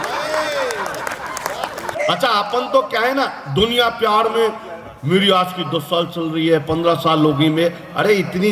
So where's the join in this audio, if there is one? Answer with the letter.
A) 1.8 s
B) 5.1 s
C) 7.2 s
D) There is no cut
A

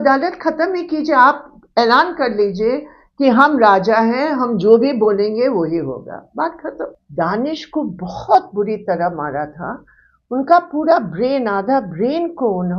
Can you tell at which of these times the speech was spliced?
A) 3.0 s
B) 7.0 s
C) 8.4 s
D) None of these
B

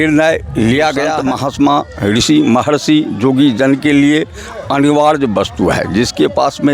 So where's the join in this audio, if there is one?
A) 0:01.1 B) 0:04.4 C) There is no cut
A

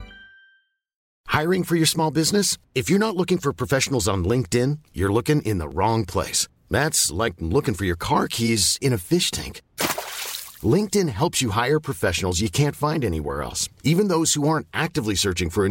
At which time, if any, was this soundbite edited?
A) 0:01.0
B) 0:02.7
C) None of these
A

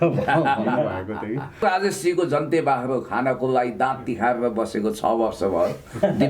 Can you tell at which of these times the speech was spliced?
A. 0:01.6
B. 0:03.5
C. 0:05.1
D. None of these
A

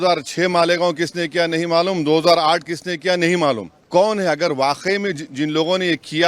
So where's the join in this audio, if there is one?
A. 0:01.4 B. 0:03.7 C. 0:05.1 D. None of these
B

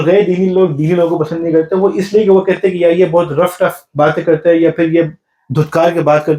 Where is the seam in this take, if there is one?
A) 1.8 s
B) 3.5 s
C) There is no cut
C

